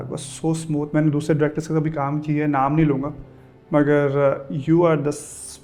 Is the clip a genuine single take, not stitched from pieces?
yes; 0 cuts

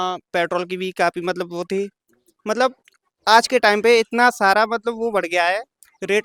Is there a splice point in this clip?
no; 0 cuts

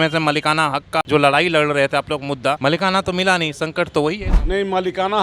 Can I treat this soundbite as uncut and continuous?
no; 3 cuts; at 1.0 s, 2.6 s, 4.3 s

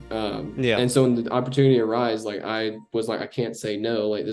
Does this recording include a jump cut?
no; 0 cuts

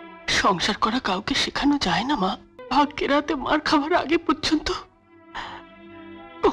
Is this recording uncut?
no; 1 cut; at 2.5 s

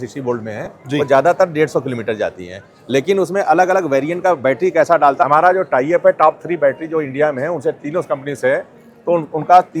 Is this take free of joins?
no; 1 cut; at 5.2 s

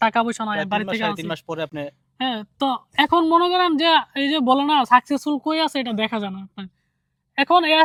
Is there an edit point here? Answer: no; 0 cuts

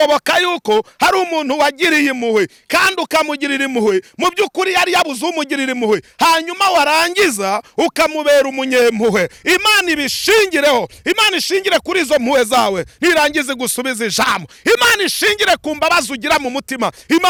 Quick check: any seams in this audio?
no; 0 cuts

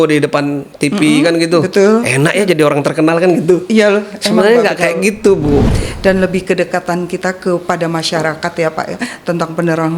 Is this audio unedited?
no; 1 cut; at 5.8 s

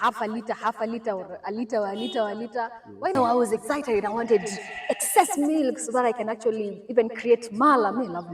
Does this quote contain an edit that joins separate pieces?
yes; 1 cut; at 3.2 s

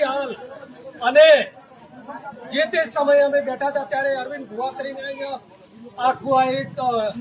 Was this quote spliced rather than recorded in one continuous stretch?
no; 0 cuts

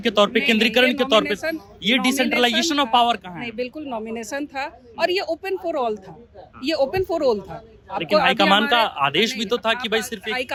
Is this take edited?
no; 0 cuts

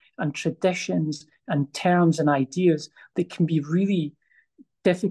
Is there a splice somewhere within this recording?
no; 0 cuts

